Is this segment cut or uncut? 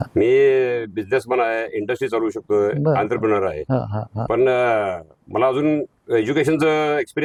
uncut